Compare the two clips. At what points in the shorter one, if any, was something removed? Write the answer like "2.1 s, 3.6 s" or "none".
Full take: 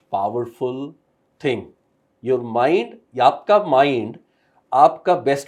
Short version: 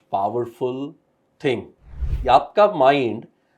2.1 s